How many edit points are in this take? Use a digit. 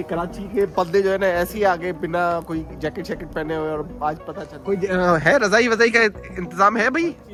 0